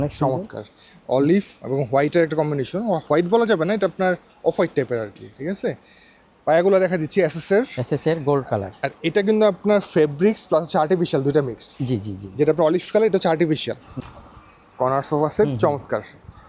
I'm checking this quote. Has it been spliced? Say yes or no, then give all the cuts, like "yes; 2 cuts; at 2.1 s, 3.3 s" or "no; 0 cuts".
no; 0 cuts